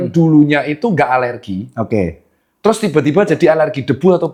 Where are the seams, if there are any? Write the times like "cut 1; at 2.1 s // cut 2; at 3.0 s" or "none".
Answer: none